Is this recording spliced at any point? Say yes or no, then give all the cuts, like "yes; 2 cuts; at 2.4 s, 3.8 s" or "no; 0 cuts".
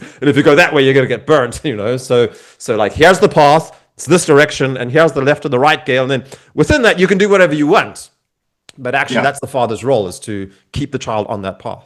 no; 0 cuts